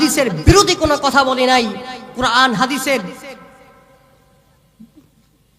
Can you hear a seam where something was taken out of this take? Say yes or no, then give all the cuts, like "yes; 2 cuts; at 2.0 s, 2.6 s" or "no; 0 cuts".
no; 0 cuts